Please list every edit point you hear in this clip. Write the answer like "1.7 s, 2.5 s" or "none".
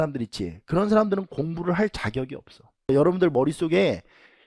2.9 s